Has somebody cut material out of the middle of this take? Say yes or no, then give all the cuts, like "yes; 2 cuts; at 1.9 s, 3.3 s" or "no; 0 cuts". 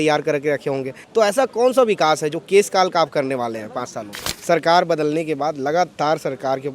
yes; 2 cuts; at 1.0 s, 4.3 s